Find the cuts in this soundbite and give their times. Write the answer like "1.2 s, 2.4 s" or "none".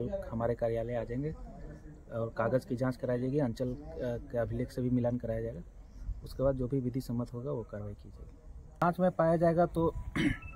8.8 s